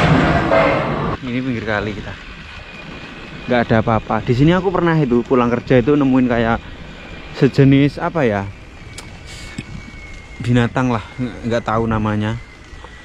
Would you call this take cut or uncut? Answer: cut